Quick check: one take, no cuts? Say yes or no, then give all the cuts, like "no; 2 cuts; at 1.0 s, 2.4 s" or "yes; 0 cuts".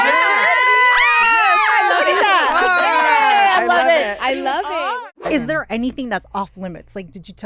no; 1 cut; at 4.9 s